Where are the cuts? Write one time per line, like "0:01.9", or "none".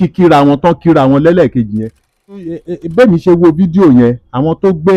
0:02.6